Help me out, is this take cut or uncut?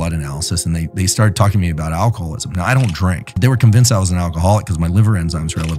cut